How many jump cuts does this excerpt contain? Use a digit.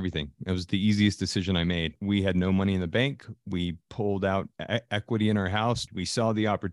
2